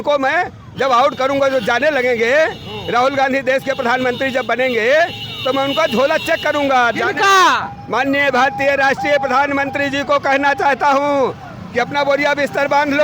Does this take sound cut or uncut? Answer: uncut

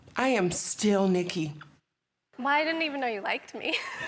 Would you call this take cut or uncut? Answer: cut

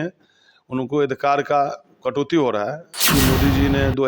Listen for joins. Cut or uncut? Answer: cut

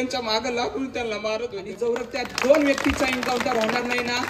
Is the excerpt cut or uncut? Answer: cut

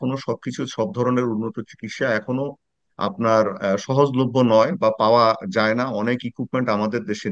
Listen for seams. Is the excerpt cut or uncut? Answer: uncut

